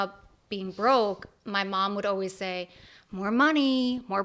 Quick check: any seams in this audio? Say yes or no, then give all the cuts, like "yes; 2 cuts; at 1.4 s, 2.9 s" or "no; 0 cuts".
no; 0 cuts